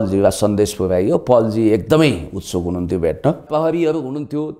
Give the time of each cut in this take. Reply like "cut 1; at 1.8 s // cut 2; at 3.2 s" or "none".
cut 1; at 3.4 s